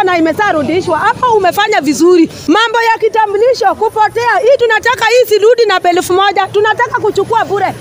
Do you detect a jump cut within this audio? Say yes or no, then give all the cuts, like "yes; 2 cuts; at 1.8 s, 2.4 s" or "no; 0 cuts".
yes; 1 cut; at 2.4 s